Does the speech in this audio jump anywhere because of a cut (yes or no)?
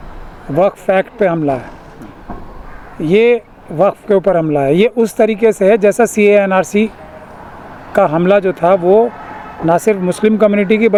no